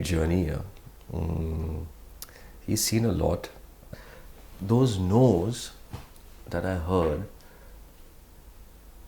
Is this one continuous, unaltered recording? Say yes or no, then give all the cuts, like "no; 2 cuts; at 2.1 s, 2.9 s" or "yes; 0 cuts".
no; 1 cut; at 3.9 s